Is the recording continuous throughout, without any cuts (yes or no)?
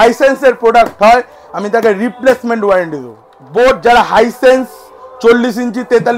yes